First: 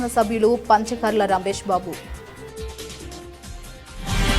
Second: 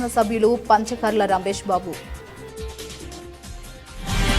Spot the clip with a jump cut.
first; 1 cut; at 2.0 s

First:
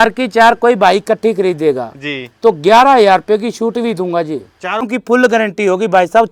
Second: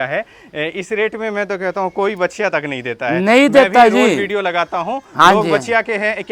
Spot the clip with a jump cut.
first; 1 cut; at 4.8 s

